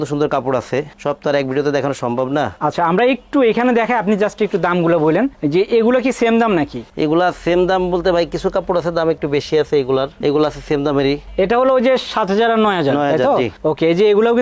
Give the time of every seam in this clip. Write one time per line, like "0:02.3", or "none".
none